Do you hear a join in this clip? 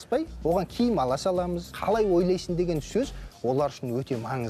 yes; 1 cut; at 1.7 s

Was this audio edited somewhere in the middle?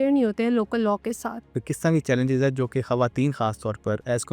yes; 1 cut; at 1.7 s

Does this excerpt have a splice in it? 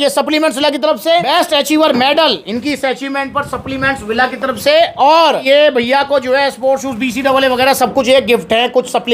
no; 0 cuts

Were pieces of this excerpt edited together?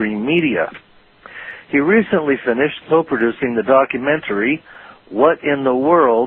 no; 0 cuts

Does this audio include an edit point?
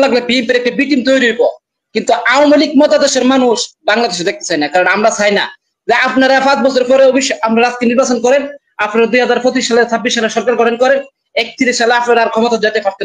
no; 0 cuts

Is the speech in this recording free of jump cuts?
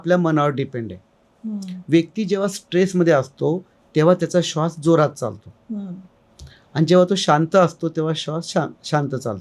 yes; 0 cuts

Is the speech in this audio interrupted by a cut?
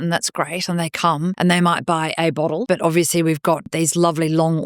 yes; 3 cuts; at 1.4 s, 2.6 s, 3.7 s

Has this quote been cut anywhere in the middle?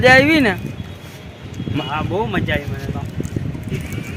no; 0 cuts

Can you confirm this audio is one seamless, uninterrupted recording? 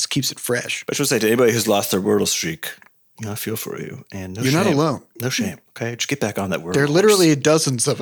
no; 1 cut; at 5.7 s

